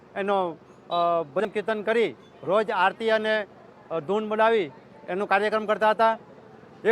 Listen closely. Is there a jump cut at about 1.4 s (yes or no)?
yes